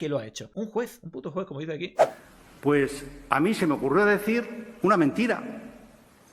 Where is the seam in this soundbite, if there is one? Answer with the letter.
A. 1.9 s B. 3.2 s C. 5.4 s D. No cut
A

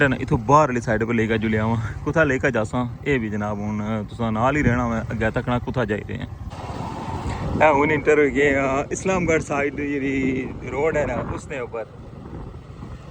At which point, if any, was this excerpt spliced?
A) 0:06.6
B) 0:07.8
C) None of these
A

